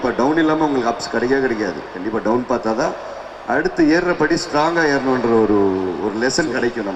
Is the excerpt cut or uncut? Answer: uncut